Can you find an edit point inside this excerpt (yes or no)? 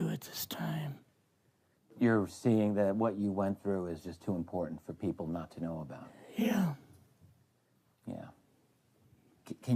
no